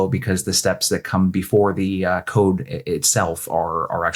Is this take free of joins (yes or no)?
yes